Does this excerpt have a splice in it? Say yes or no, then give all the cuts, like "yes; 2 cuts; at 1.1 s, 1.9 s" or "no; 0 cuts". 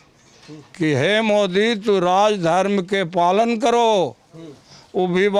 no; 0 cuts